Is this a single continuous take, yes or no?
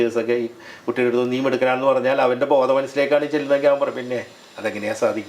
yes